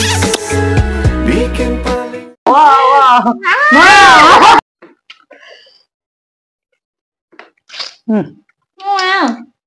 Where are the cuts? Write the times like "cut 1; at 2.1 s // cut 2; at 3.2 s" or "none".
cut 1; at 4.6 s